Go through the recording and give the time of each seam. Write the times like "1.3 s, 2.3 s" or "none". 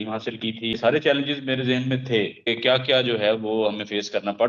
0.8 s, 2.5 s